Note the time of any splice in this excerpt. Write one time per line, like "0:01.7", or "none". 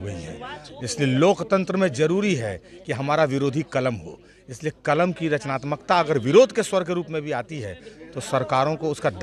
none